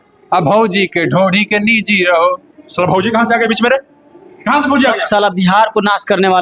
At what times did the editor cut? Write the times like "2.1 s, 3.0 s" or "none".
none